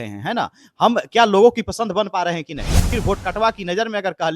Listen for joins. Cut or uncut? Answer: cut